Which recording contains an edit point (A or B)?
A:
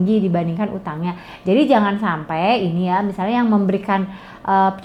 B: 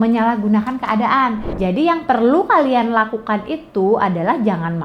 B